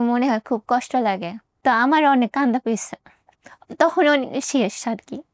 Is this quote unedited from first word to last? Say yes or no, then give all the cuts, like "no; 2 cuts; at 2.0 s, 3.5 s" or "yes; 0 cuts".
no; 1 cut; at 1.4 s